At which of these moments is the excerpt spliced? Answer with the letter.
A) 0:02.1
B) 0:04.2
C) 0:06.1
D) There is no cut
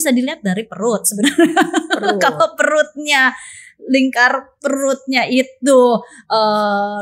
D